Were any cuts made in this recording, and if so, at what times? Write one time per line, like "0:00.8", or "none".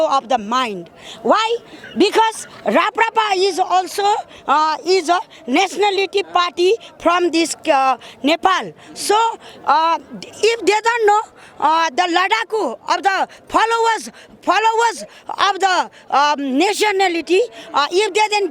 none